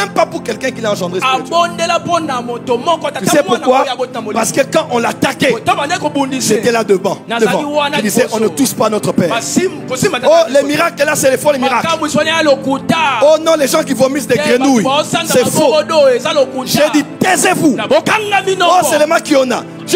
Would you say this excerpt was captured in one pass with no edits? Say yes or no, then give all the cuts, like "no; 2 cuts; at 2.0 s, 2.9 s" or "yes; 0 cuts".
yes; 0 cuts